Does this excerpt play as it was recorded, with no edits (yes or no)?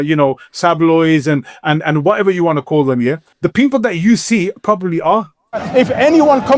no